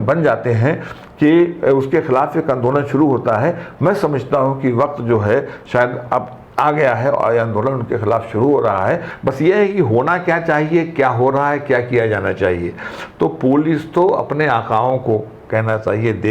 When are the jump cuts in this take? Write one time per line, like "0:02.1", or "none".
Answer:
0:09.1